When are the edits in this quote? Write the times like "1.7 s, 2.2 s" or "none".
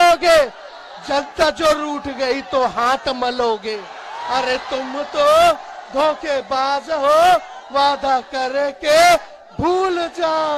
none